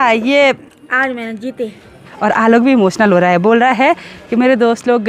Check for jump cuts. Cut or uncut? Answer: cut